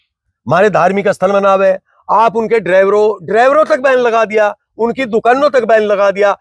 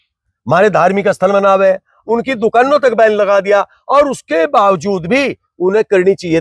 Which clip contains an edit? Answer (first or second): second